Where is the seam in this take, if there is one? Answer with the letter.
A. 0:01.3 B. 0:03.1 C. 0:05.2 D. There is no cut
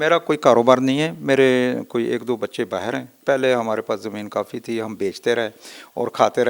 B